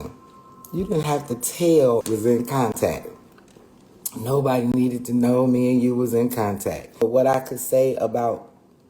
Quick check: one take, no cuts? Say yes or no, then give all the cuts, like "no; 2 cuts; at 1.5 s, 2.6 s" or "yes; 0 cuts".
no; 2 cuts; at 2.0 s, 7.0 s